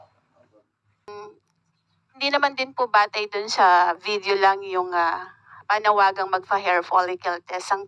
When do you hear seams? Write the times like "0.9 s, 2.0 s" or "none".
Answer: 1.1 s